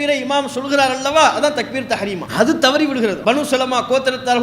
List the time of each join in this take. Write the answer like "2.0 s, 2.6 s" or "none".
2.2 s, 3.2 s